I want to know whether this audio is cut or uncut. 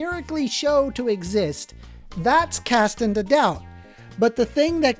uncut